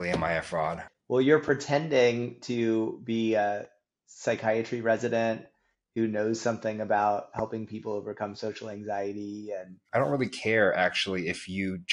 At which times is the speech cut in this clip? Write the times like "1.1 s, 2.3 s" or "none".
0.9 s, 9.8 s